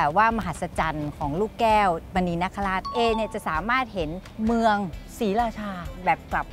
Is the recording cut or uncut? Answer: cut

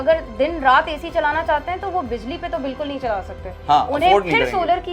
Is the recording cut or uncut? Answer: uncut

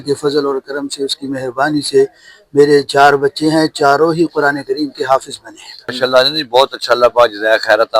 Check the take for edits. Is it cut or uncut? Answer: cut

